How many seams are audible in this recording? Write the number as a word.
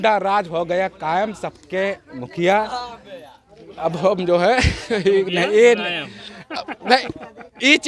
zero